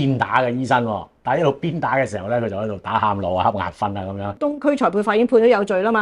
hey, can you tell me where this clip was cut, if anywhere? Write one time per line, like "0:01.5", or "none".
0:04.4